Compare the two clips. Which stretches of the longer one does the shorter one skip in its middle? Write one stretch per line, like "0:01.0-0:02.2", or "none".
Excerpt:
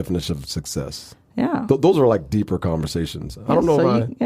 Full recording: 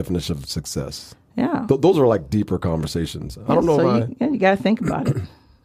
none